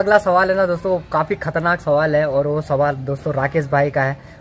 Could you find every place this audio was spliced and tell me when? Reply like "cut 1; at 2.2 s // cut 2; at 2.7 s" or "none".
none